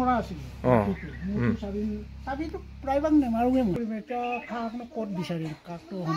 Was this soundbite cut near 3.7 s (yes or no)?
yes